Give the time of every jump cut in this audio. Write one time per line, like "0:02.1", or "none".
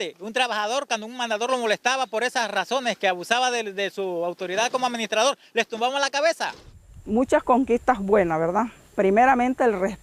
0:06.1